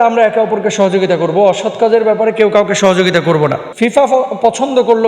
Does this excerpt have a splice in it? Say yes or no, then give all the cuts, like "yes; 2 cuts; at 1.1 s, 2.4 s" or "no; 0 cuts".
yes; 1 cut; at 3.7 s